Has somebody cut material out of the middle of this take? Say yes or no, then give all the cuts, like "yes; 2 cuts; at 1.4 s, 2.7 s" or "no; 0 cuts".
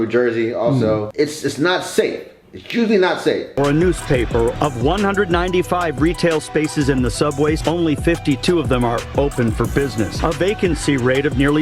yes; 1 cut; at 1.1 s